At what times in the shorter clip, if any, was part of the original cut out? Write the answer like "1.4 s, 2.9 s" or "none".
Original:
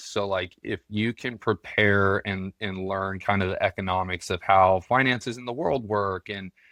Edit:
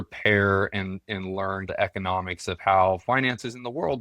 1.7 s